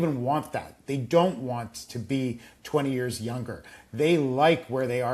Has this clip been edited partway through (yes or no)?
no